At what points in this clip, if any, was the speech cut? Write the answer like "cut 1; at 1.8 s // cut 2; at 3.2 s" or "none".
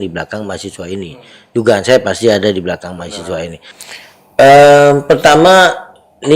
cut 1; at 3.7 s